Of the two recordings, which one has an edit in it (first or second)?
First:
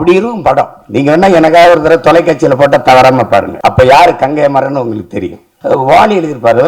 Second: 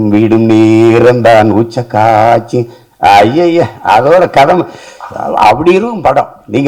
first